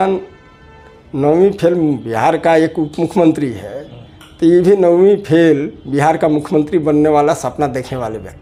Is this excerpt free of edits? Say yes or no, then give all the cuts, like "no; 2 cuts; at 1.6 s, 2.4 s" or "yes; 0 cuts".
yes; 0 cuts